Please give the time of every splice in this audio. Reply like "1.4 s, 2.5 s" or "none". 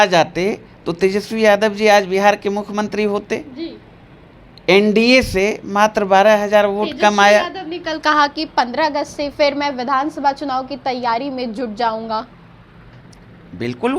none